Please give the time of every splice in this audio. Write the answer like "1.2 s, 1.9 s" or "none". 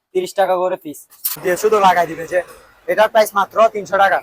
1.4 s